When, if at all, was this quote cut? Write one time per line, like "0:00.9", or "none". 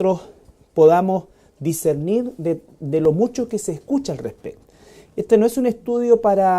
0:03.7